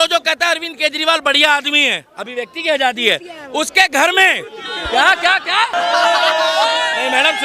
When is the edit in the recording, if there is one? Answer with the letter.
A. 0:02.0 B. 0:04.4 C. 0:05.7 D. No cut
C